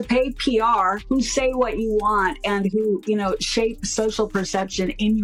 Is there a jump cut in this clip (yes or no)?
no